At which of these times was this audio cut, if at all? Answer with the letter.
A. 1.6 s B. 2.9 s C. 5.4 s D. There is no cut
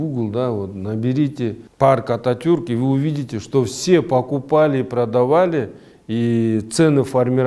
A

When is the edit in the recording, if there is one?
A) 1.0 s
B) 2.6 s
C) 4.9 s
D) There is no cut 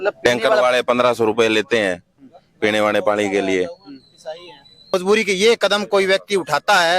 C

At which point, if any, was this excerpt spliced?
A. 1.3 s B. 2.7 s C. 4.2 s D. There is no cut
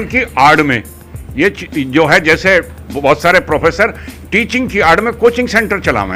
D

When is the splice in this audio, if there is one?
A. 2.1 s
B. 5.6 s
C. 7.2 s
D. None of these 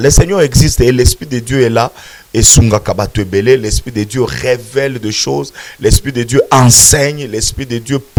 D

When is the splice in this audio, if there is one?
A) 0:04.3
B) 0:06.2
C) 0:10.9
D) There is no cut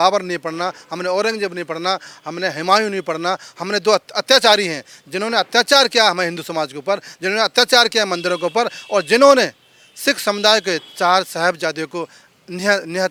D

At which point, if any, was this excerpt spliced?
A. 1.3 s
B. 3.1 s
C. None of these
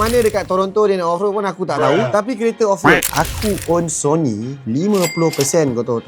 B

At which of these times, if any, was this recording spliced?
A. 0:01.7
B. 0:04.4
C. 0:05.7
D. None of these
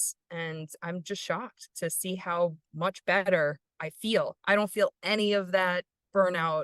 A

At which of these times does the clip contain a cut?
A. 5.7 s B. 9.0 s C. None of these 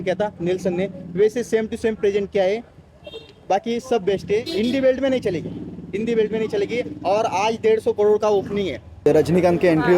B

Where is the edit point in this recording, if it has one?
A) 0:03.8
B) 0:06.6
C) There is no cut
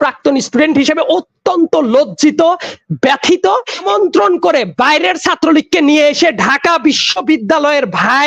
A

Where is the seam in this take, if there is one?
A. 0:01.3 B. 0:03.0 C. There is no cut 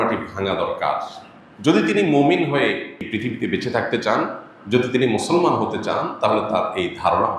B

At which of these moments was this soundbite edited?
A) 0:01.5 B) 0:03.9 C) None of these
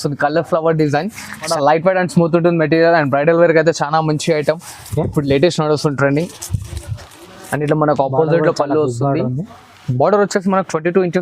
A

